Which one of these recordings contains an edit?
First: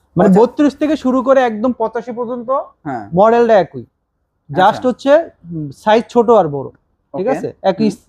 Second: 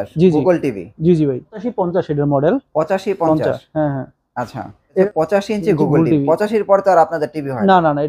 second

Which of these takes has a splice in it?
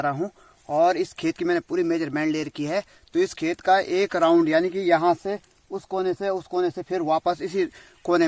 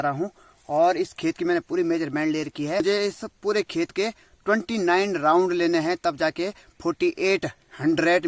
second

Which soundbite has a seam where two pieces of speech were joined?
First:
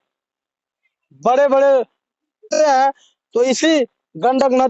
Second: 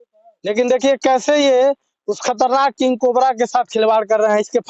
first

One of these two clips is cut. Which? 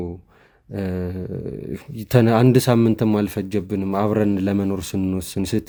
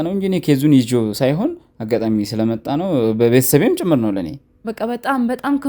second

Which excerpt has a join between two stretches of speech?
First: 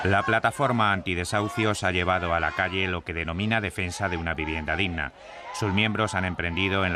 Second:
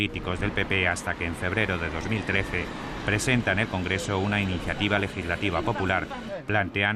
second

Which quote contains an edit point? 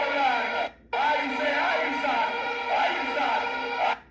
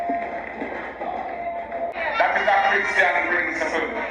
second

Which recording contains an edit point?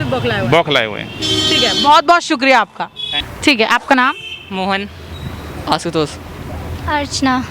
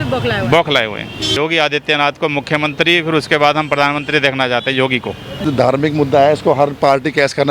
second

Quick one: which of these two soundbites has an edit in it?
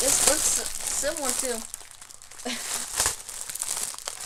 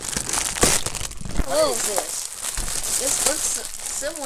second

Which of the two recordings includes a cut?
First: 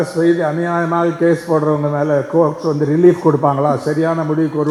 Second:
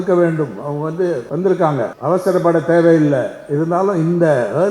second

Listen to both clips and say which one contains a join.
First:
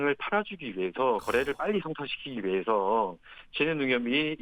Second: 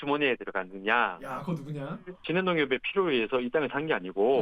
second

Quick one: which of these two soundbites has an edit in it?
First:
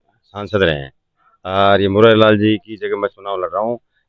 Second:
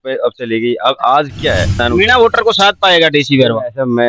second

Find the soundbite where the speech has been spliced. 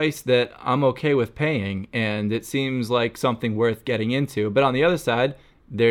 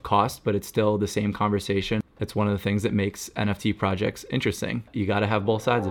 second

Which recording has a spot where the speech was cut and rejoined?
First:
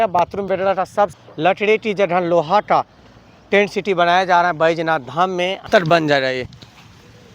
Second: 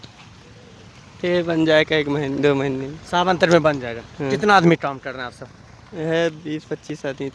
first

